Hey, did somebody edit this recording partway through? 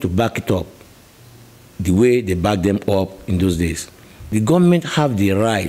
yes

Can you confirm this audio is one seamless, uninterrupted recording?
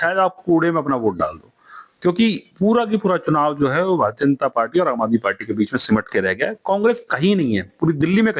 yes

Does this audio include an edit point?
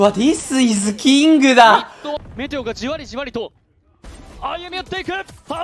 yes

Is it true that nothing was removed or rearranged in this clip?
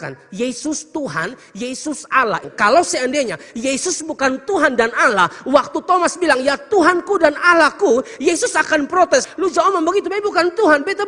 no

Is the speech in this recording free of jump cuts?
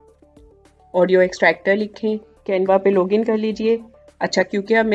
no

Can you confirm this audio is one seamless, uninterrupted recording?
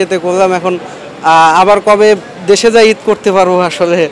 yes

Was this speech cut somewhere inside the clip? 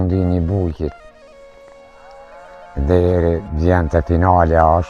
no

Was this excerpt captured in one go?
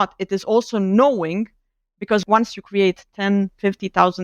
no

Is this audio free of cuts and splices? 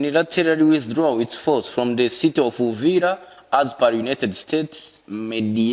yes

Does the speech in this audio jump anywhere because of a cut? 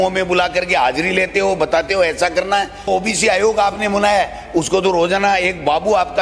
yes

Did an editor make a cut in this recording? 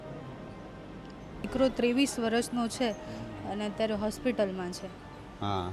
yes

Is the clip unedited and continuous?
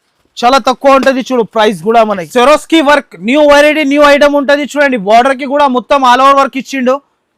no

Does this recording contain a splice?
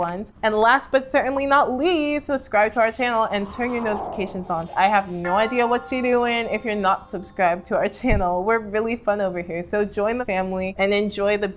yes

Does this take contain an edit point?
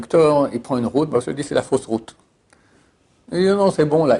no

